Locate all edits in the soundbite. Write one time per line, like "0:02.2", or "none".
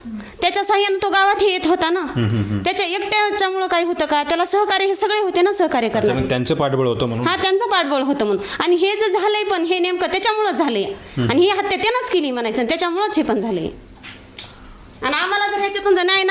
none